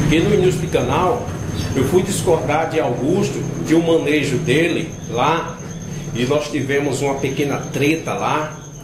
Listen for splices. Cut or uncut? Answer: uncut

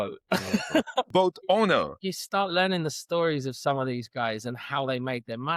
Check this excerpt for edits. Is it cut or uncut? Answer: cut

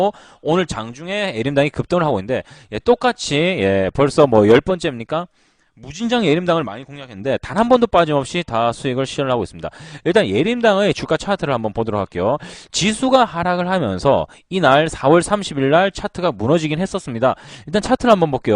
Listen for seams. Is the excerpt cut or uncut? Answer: cut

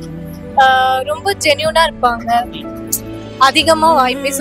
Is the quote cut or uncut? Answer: uncut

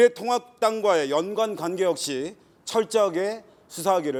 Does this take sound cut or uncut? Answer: uncut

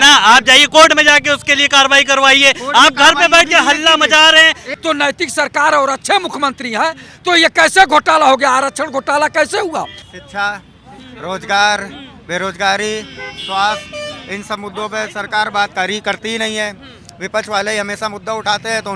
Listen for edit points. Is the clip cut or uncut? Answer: cut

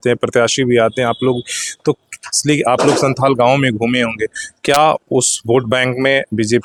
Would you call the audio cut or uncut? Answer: uncut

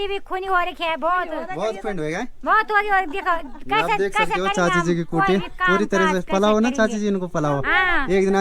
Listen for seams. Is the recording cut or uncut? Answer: uncut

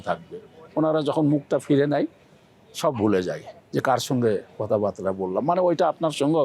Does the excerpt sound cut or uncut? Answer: uncut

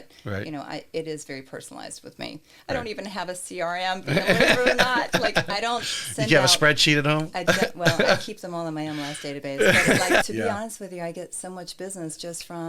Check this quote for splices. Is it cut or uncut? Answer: cut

